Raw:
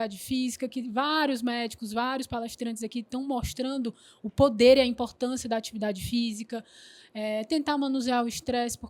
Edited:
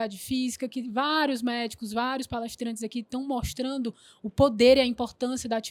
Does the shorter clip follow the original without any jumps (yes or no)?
yes